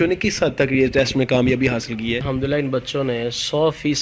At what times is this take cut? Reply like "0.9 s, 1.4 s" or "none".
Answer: 2.2 s